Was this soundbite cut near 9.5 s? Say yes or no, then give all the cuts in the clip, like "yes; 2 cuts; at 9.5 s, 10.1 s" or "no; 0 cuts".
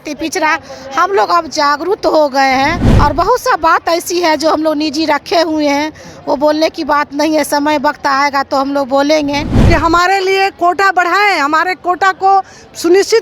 yes; 2 cuts; at 2.9 s, 9.5 s